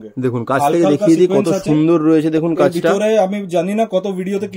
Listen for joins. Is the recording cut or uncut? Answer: uncut